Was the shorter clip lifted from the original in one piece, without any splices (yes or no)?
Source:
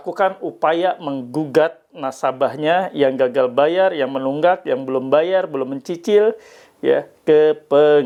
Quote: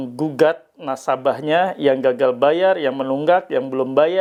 yes